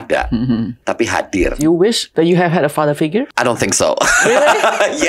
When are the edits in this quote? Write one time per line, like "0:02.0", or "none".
0:01.6
0:03.3